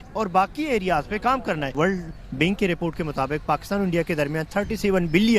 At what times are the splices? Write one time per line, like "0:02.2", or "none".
0:01.7